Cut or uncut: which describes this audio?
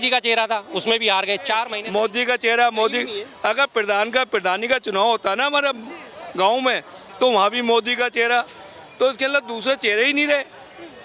cut